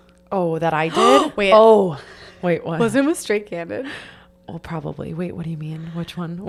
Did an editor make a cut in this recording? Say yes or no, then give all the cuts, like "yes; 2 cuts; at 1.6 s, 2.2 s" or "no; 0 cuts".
no; 0 cuts